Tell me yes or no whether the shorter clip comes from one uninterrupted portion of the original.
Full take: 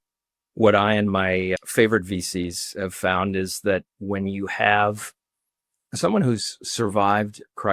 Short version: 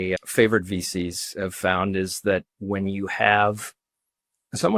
yes